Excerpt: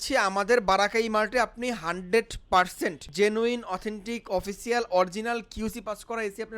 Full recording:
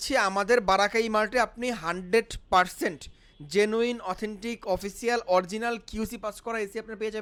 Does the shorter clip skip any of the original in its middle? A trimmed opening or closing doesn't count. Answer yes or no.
yes